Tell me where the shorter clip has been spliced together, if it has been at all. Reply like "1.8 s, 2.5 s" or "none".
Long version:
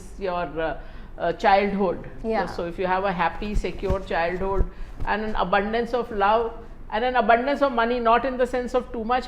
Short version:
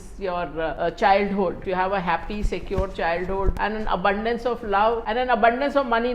0.7 s, 1.6 s, 3.5 s, 5.0 s